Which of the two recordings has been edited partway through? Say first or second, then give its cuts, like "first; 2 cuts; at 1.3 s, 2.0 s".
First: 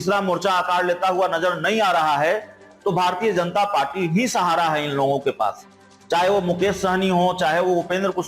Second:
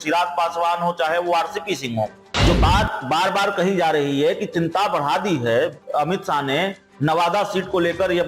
second; 1 cut; at 2.3 s